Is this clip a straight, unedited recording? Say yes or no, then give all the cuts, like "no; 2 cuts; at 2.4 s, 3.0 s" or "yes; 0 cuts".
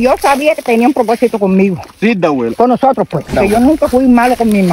no; 1 cut; at 3.3 s